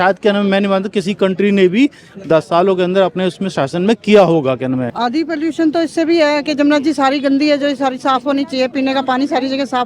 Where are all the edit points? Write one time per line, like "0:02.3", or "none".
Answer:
0:04.9